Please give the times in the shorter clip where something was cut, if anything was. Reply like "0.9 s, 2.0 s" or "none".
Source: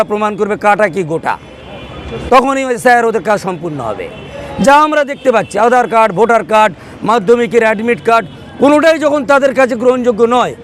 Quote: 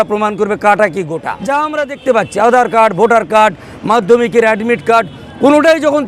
1.3 s